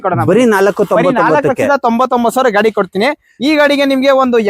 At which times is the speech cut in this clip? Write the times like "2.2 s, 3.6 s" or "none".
none